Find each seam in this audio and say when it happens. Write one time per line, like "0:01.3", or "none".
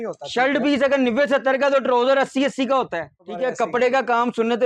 0:03.2